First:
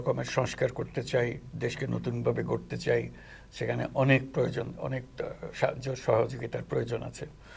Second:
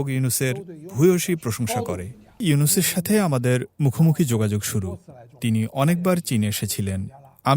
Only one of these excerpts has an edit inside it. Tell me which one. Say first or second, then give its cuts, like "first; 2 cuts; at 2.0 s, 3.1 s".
second; 1 cut; at 2.4 s